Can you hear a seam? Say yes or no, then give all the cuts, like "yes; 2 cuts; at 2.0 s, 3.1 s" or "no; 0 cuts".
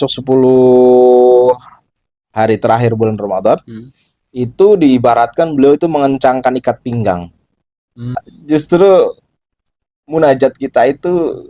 yes; 1 cut; at 8.2 s